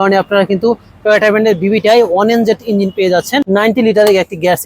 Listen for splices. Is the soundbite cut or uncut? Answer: cut